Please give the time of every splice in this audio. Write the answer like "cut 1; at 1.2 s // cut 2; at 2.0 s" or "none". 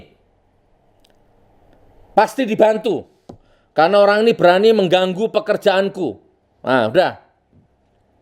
none